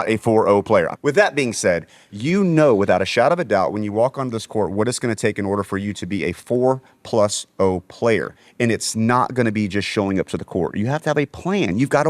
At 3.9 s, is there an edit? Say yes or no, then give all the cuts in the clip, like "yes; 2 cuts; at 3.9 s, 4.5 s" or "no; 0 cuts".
no; 2 cuts; at 0.9 s, 2.1 s